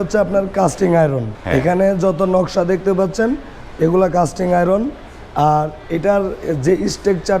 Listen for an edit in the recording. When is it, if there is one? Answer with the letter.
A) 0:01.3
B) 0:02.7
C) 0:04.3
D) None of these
A